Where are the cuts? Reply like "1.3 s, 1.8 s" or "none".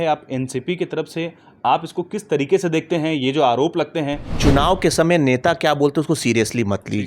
4.3 s